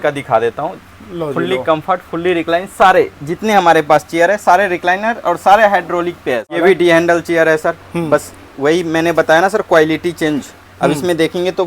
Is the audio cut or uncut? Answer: cut